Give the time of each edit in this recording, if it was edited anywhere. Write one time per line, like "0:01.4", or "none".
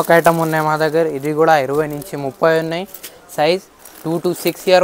none